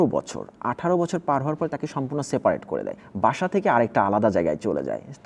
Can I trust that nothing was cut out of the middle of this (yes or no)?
no